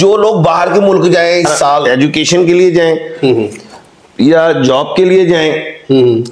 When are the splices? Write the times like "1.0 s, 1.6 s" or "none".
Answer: 1.8 s